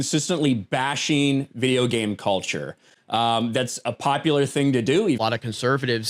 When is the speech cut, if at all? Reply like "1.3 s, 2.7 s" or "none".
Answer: 5.2 s